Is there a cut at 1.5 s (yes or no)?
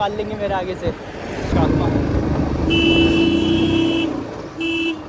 yes